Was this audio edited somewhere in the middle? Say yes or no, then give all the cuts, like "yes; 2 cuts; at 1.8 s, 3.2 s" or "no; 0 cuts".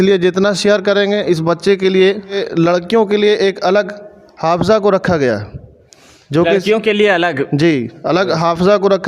yes; 1 cut; at 2.4 s